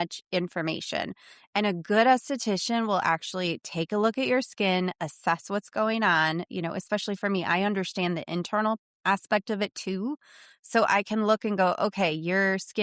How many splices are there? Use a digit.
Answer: 0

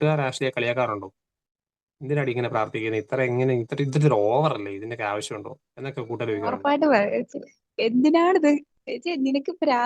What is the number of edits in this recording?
1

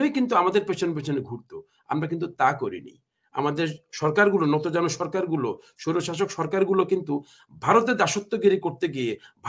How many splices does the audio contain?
0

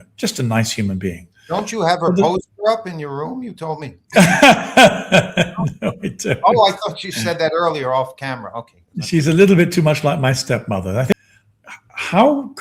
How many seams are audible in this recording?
1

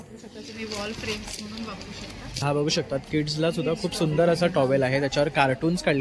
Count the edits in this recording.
1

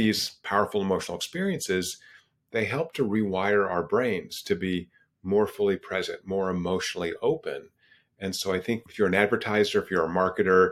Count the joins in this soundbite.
1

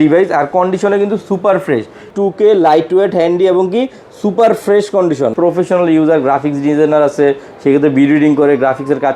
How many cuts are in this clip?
2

